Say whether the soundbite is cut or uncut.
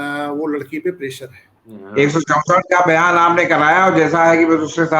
cut